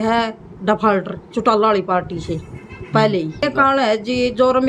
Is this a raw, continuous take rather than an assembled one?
no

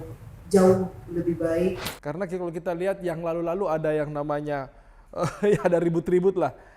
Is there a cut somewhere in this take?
yes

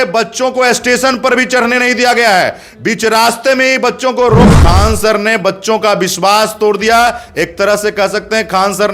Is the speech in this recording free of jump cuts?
no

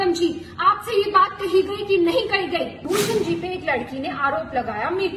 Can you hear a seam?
yes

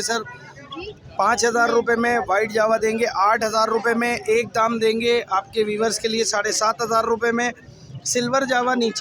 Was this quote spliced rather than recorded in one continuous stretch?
no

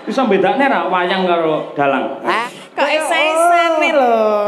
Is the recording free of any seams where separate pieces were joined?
no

